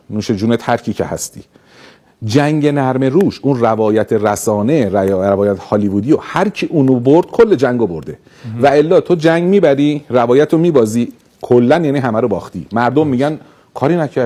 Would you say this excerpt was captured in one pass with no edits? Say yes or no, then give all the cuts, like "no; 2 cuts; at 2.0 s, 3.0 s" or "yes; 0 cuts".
yes; 0 cuts